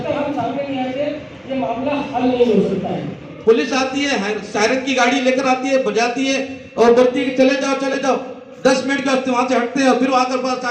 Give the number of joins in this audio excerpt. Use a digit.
1